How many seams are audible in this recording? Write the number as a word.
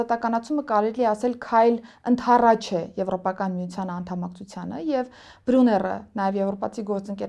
zero